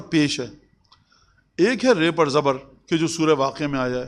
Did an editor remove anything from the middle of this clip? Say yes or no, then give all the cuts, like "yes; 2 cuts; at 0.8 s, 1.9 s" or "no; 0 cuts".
no; 0 cuts